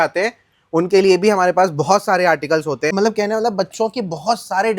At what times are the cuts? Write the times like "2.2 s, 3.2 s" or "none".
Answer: 2.9 s